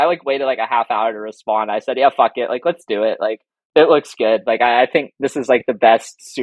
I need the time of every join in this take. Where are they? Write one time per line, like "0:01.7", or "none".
none